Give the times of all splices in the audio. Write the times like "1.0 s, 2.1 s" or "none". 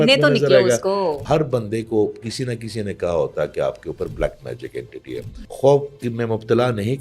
1.2 s, 5.3 s